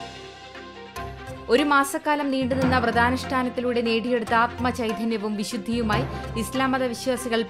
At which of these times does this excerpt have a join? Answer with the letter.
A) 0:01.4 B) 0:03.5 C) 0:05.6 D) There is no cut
D